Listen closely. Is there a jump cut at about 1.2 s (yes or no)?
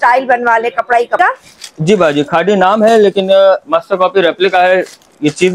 yes